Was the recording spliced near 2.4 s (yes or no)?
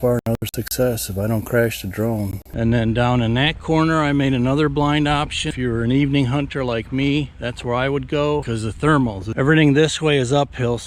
yes